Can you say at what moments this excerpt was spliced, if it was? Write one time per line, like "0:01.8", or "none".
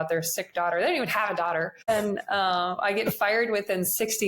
0:01.9